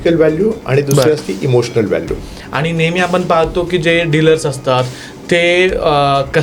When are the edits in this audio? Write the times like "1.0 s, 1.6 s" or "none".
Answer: 2.2 s

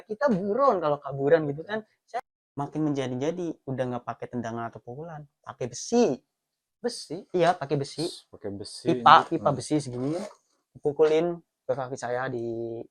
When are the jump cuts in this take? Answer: 2.2 s

